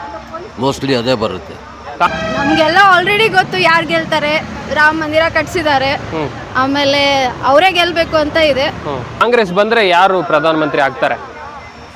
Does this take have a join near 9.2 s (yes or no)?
yes